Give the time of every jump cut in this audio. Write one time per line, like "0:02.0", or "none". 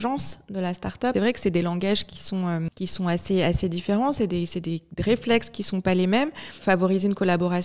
0:01.1
0:02.7
0:06.6

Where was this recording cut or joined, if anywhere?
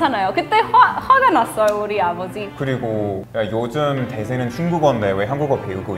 0:02.5

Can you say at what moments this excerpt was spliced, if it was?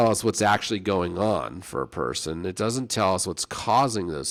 none

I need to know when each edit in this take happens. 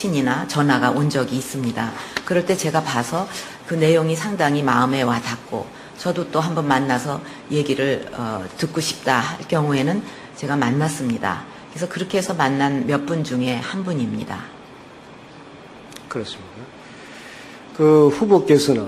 0:12.3

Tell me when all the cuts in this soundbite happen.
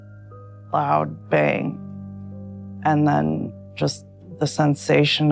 0:02.3

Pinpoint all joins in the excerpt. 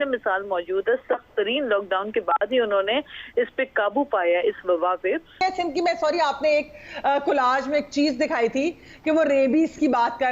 0:05.4

